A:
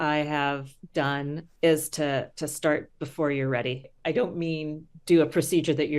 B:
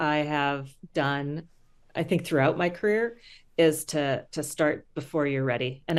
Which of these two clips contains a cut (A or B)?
A